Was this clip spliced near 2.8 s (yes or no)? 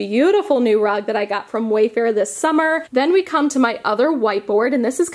yes